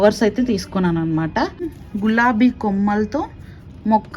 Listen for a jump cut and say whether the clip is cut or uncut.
cut